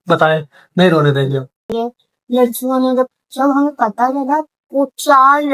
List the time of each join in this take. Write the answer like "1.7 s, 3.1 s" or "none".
1.7 s